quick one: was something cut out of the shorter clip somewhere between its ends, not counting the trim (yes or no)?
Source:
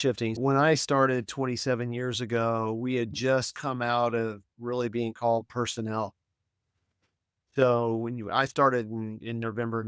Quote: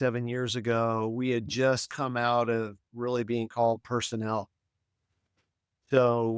no